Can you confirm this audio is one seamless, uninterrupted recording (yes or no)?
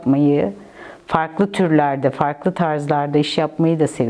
yes